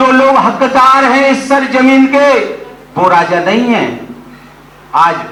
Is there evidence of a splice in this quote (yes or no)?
no